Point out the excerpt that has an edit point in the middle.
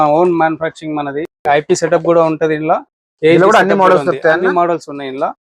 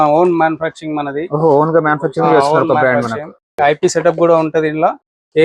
first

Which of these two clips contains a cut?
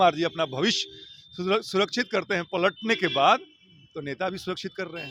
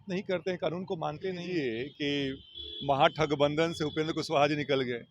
second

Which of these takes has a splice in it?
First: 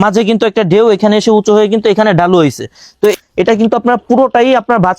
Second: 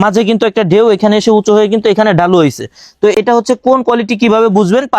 first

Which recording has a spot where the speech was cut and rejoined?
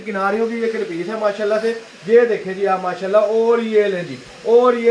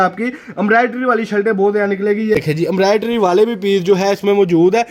second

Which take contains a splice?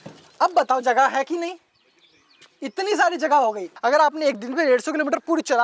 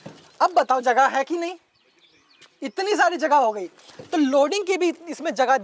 first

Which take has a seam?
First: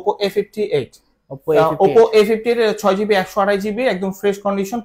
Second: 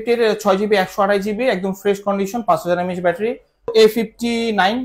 second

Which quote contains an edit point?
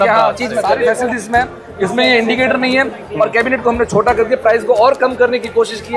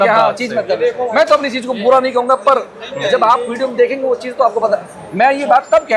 first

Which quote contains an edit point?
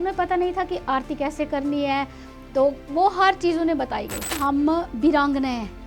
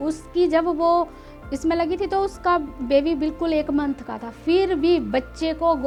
first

